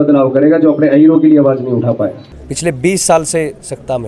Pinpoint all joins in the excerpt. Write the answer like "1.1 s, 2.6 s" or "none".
2.3 s